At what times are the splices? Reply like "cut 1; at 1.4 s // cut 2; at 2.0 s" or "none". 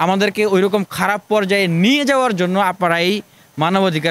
none

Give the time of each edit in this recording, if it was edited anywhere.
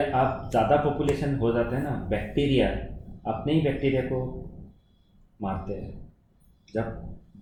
none

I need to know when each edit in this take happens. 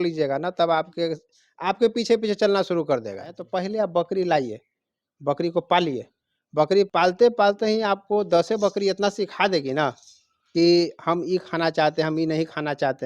cut 1; at 3.4 s // cut 2; at 6.9 s

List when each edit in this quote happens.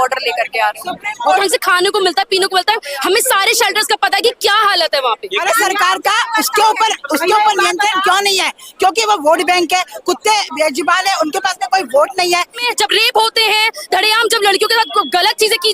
cut 1; at 1.4 s // cut 2; at 5.4 s // cut 3; at 12.6 s

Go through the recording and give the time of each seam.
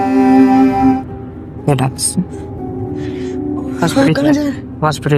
cut 1; at 1.0 s

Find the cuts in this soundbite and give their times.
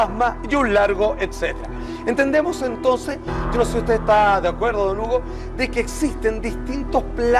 cut 1; at 3.3 s

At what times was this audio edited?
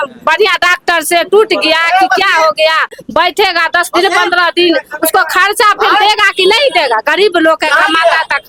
none

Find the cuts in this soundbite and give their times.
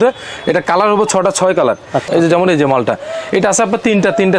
cut 1; at 2.1 s

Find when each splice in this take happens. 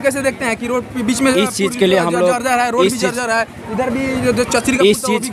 none

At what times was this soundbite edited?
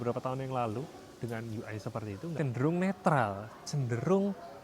cut 1; at 2.3 s

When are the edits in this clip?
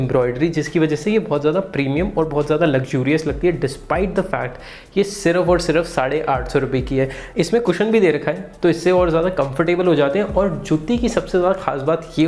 none

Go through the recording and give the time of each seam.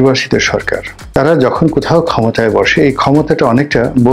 cut 1; at 1.0 s

